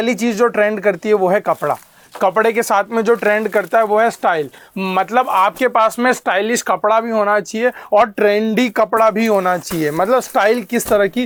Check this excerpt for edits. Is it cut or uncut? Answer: uncut